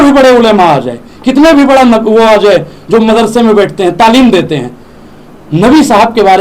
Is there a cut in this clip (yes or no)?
no